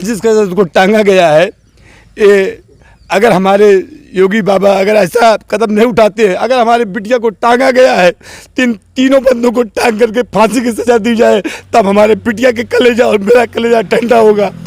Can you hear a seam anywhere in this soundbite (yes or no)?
no